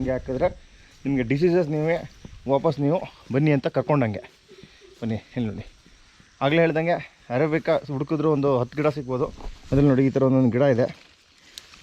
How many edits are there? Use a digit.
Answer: 0